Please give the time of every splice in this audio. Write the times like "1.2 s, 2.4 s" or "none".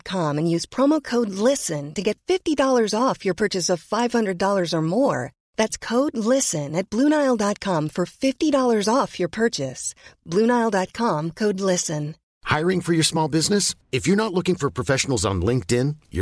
none